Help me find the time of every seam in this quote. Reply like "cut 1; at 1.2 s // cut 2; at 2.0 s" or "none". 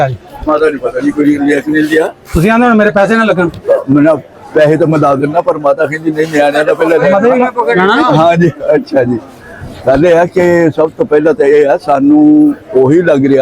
none